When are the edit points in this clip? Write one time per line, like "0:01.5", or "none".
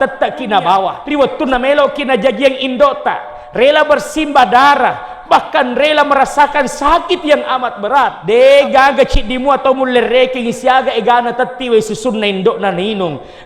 0:01.0
0:08.2